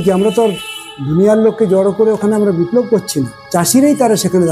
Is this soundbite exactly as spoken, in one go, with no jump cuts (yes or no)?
no